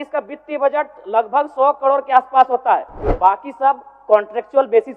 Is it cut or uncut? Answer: cut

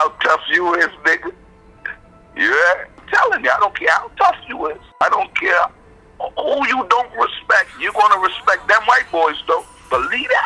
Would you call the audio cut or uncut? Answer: cut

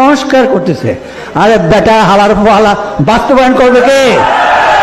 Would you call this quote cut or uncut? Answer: uncut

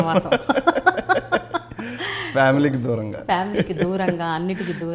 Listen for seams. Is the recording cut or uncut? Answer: uncut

